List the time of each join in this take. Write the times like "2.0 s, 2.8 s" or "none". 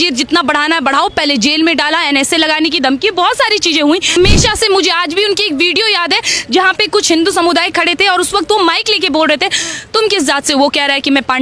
4.1 s